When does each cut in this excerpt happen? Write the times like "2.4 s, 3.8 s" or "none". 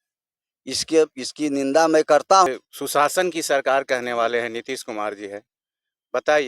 2.5 s